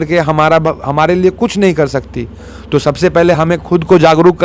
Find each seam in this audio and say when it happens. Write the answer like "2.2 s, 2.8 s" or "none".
none